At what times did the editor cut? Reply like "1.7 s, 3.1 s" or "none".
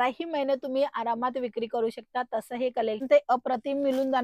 3.0 s